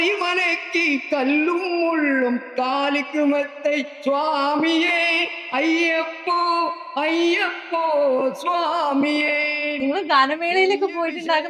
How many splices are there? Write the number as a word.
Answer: one